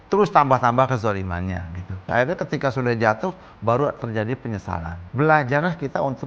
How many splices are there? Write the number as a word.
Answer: two